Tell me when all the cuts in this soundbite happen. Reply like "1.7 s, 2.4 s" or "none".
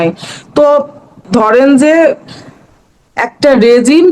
1.2 s